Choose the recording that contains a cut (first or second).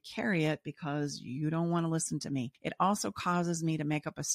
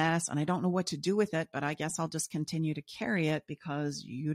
first